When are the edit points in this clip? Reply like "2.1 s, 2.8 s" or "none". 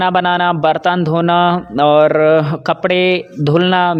none